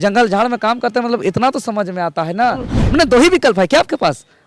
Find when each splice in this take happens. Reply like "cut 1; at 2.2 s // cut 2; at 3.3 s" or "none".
cut 1; at 2.7 s

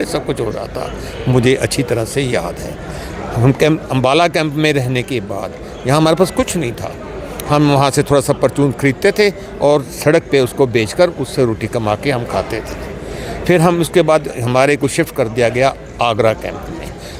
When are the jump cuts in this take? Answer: none

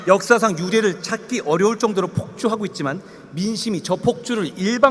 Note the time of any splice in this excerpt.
none

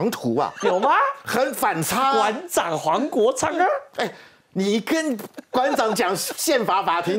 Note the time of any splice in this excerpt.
none

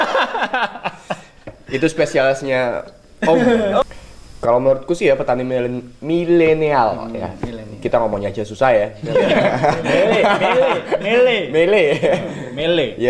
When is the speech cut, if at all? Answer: cut 1; at 3.8 s

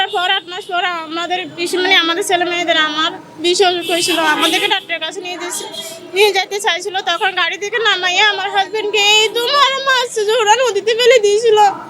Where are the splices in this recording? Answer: none

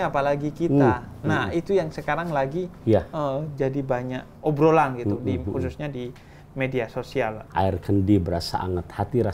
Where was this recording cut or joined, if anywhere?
cut 1; at 7.4 s

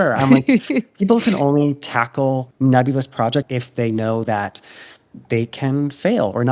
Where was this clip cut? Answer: cut 1; at 2.5 s // cut 2; at 3.6 s

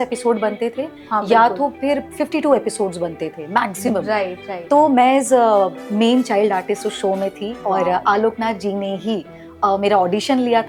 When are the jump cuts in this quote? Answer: none

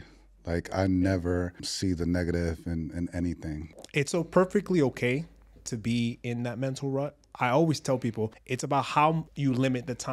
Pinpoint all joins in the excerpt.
cut 1; at 1.6 s // cut 2; at 3.7 s // cut 3; at 7.2 s // cut 4; at 8.5 s // cut 5; at 9.3 s

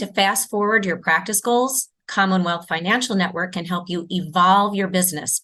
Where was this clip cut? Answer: none

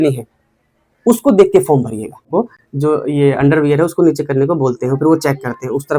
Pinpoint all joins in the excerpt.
cut 1; at 2.2 s

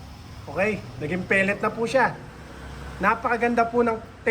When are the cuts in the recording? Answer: none

